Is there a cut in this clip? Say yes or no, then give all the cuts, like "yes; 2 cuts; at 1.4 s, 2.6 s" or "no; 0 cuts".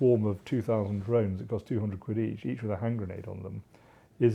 no; 0 cuts